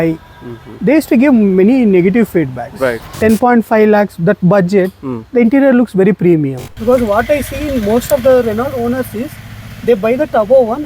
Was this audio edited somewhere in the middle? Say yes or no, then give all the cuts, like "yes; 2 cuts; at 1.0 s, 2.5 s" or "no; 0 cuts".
yes; 2 cuts; at 3.1 s, 6.7 s